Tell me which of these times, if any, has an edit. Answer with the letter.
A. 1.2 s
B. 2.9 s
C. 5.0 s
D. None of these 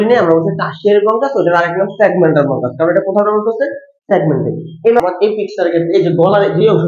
C